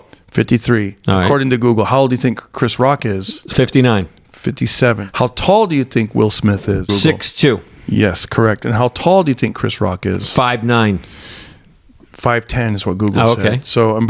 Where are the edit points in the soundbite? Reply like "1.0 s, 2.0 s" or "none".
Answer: 5.0 s, 6.9 s